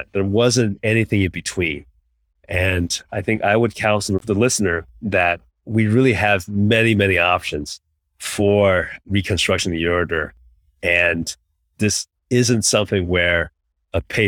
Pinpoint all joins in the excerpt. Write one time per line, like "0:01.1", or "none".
0:12.1